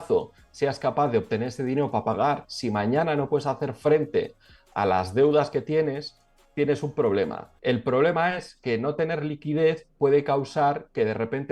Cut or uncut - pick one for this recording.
cut